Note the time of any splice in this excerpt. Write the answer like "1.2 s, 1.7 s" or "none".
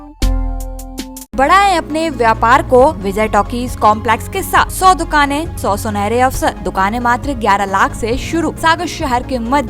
1.3 s, 3.0 s, 4.7 s, 5.5 s, 6.6 s, 8.6 s